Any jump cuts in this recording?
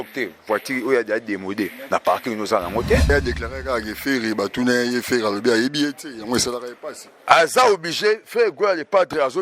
yes; 1 cut; at 3.1 s

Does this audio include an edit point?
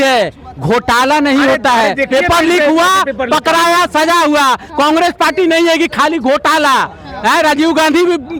no; 0 cuts

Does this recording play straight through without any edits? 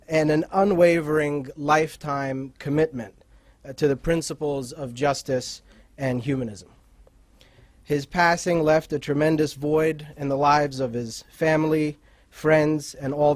yes; 0 cuts

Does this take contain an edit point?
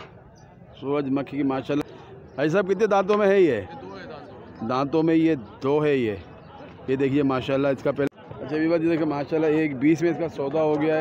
yes; 2 cuts; at 1.8 s, 8.1 s

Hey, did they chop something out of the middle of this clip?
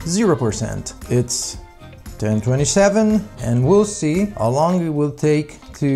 yes; 1 cut; at 4.3 s

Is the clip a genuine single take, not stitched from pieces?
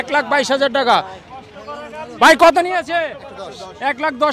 yes; 0 cuts

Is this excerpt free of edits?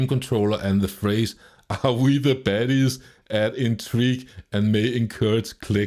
yes; 0 cuts

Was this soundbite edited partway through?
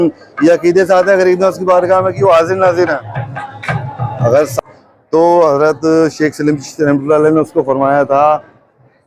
yes; 1 cut; at 4.5 s

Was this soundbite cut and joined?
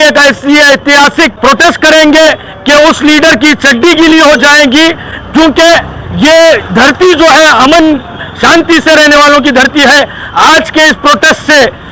no; 0 cuts

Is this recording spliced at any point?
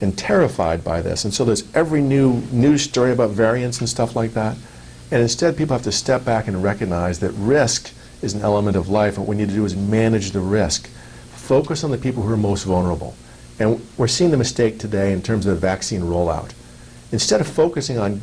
no; 0 cuts

